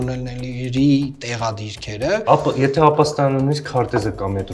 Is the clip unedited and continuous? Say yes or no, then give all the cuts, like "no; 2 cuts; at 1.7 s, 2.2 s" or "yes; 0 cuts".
no; 1 cut; at 2.2 s